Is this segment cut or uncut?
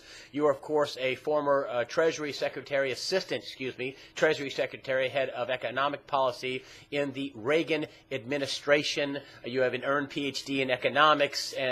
cut